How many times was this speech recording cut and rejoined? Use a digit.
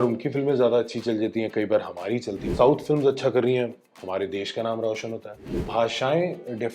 2